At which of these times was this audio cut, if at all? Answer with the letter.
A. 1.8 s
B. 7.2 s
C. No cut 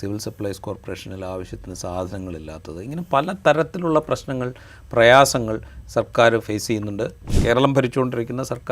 B